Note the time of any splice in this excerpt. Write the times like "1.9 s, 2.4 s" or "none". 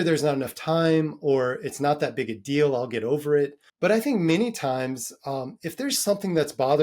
3.6 s